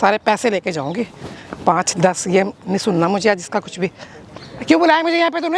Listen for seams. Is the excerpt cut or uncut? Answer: uncut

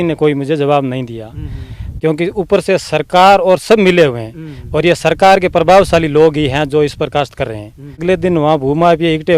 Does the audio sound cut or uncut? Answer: cut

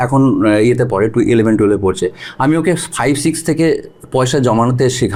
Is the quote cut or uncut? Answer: uncut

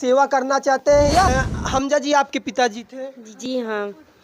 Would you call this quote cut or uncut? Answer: cut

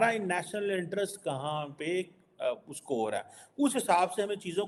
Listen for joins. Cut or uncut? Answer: uncut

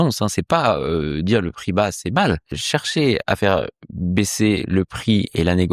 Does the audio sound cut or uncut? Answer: cut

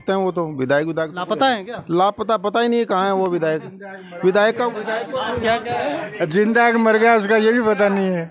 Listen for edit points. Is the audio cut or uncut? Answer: uncut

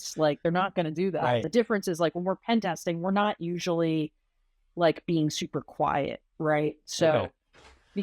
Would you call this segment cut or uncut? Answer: cut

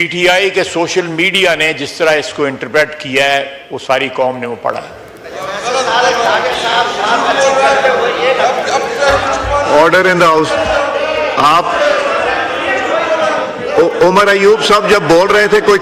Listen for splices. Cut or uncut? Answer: uncut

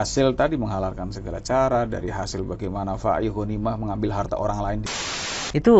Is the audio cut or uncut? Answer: cut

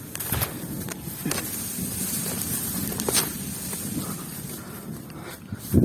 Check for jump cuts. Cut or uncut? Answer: uncut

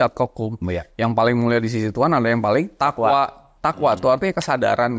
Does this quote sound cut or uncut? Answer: cut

